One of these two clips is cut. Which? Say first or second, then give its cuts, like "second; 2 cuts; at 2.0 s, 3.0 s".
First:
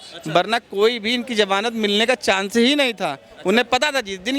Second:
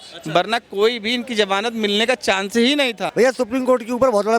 second; 1 cut; at 3.0 s